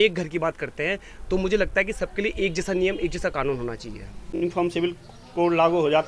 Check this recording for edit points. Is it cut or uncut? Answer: cut